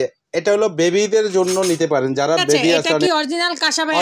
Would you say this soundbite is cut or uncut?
cut